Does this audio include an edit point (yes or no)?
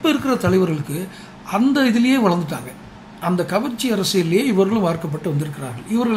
no